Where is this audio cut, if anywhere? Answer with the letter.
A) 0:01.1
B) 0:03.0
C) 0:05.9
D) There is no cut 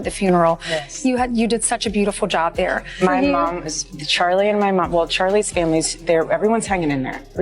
B